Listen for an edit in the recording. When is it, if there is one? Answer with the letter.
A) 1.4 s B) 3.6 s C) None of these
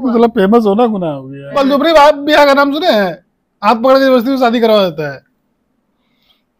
A